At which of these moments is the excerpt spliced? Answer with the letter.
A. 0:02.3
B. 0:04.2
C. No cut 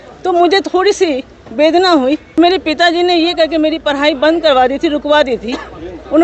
A